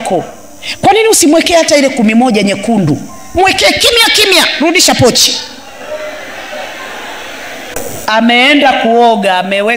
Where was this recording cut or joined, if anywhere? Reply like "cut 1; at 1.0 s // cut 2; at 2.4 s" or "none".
cut 1; at 7.7 s